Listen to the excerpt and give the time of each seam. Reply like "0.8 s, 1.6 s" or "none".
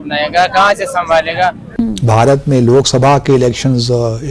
1.6 s